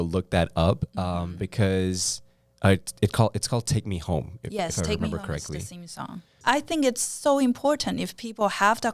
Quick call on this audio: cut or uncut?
cut